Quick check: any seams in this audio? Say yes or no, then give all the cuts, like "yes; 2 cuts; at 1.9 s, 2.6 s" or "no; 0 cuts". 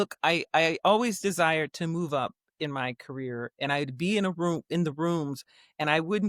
no; 0 cuts